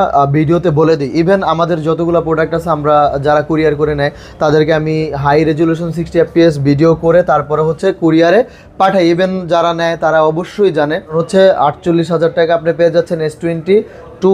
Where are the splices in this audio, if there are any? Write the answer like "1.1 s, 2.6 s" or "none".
11.1 s